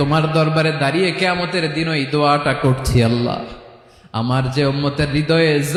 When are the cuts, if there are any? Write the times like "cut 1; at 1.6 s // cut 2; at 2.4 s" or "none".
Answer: none